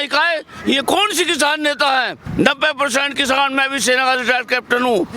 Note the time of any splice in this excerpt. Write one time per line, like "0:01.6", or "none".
0:02.2